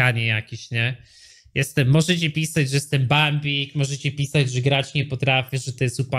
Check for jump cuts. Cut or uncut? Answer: uncut